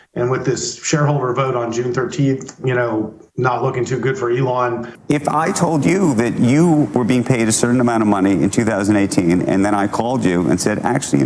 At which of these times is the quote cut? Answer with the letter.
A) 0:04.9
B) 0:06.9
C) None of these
A